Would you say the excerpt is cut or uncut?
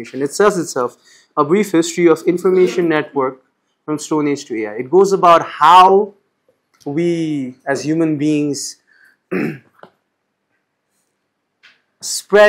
uncut